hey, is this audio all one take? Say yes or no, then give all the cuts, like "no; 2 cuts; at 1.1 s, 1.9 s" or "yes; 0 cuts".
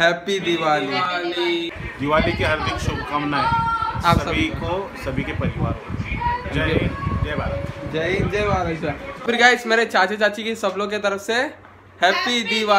no; 2 cuts; at 1.6 s, 9.1 s